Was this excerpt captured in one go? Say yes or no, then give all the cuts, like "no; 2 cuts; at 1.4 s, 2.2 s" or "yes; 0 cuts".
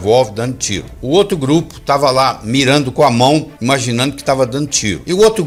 yes; 0 cuts